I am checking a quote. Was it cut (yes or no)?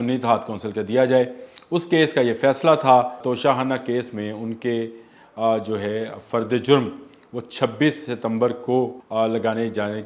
yes